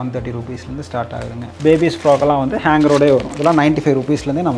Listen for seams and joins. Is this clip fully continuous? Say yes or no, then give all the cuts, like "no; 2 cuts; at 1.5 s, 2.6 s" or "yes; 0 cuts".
yes; 0 cuts